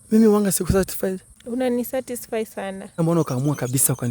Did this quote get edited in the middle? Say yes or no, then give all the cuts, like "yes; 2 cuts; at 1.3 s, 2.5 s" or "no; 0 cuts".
yes; 2 cuts; at 1.3 s, 3.0 s